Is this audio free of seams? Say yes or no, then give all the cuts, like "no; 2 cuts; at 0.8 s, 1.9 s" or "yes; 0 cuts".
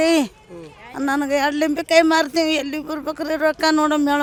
yes; 0 cuts